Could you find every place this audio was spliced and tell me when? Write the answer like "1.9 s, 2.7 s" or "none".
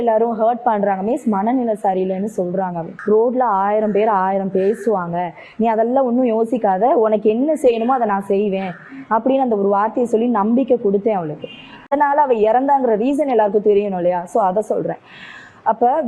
2.9 s, 11.9 s